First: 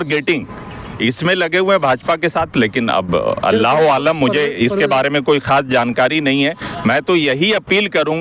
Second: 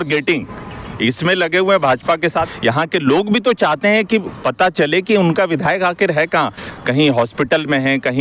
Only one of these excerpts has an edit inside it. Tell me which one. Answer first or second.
second